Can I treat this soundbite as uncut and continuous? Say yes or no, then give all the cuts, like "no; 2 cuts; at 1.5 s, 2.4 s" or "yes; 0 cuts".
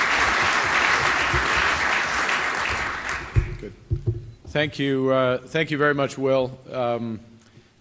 yes; 0 cuts